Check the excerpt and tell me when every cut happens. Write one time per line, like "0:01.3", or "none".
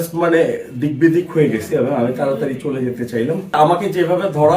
0:03.6